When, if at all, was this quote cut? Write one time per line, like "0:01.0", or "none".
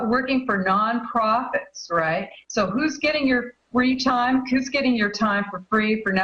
0:03.6